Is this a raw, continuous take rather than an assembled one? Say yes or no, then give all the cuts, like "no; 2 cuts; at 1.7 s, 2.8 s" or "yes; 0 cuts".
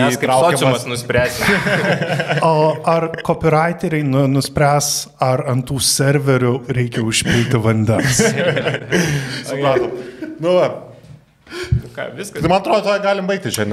yes; 0 cuts